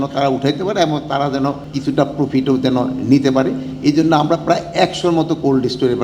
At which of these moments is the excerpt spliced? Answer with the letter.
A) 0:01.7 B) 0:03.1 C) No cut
A